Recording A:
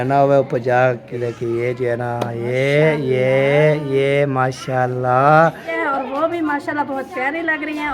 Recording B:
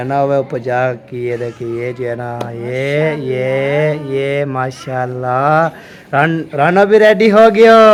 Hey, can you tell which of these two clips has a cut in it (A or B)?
A